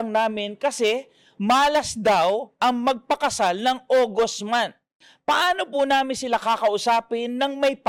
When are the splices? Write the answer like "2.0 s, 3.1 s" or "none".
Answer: none